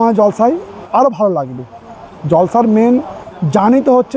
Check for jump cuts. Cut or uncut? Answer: uncut